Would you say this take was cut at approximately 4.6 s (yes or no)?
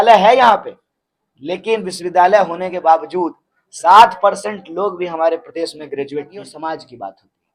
no